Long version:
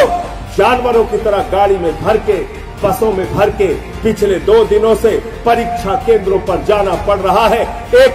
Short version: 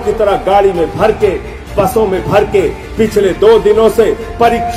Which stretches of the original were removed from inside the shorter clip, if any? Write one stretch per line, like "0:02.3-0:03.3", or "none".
none